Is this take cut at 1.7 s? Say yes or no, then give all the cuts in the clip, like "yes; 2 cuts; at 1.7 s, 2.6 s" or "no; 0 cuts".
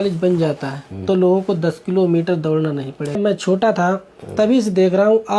no; 2 cuts; at 3.2 s, 4.5 s